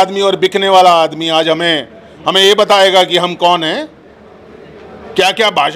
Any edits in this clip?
no; 0 cuts

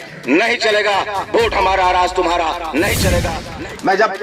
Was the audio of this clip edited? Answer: yes; 1 cut; at 3.3 s

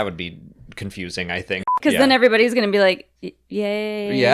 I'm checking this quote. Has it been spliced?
yes; 1 cut; at 1.8 s

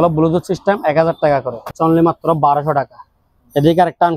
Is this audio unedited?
no; 1 cut; at 1.7 s

